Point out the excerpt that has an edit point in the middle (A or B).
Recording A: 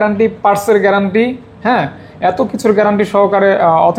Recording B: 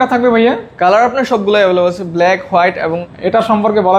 B